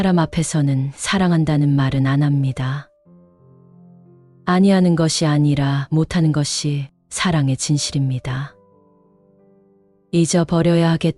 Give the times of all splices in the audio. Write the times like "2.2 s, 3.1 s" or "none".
3.0 s, 4.3 s

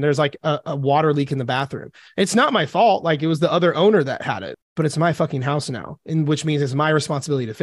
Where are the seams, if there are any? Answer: 4.5 s

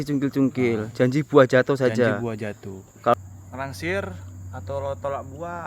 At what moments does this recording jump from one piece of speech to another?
3.2 s

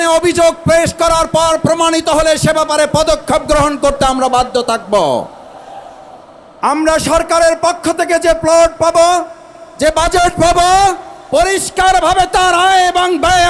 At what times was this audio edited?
none

